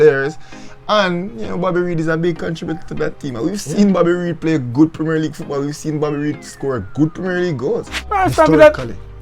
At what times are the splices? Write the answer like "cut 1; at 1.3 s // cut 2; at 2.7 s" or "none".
cut 1; at 8.0 s